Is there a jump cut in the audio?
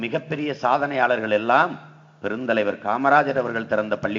no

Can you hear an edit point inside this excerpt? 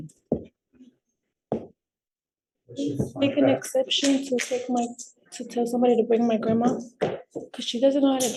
no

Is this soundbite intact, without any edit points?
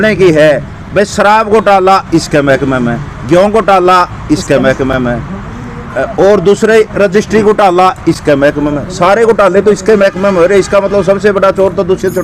yes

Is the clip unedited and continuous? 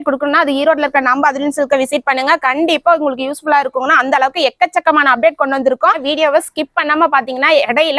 no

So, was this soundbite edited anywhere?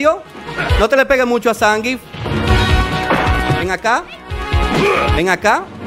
no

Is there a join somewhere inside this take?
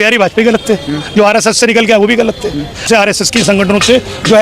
yes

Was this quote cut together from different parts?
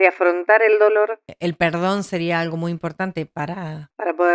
yes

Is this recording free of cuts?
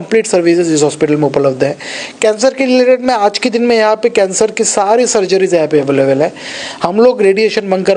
yes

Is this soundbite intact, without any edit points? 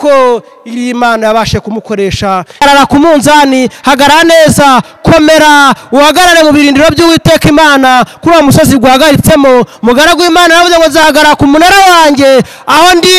no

